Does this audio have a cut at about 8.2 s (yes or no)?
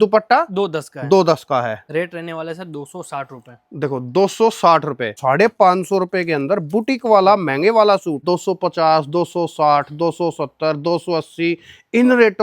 yes